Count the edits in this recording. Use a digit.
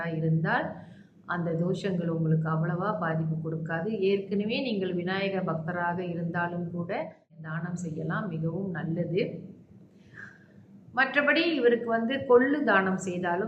1